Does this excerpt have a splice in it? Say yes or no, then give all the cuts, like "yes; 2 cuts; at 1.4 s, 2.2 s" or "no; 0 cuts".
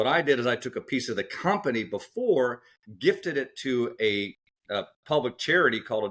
no; 0 cuts